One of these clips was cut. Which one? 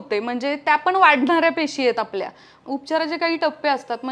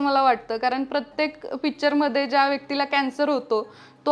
first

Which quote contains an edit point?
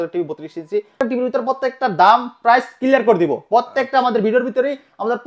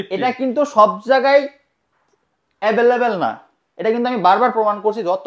first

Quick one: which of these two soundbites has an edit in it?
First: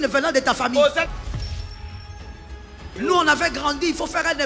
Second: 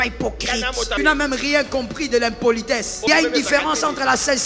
second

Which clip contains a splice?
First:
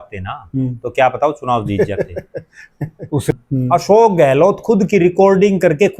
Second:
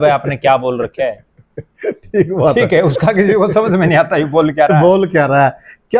first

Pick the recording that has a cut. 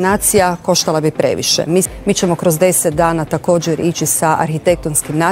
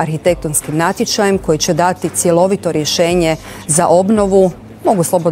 first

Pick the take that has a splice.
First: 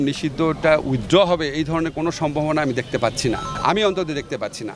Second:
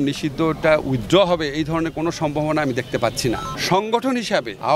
second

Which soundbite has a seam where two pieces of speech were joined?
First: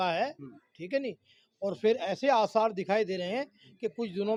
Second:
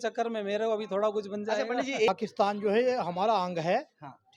second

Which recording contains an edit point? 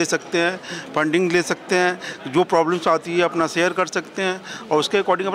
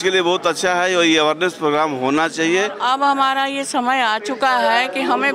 second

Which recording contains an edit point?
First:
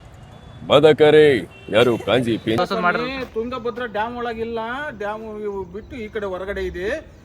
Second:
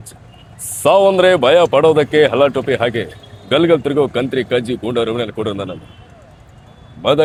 first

